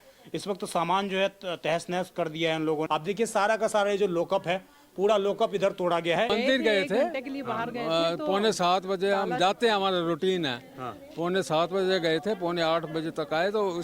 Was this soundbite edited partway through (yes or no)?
yes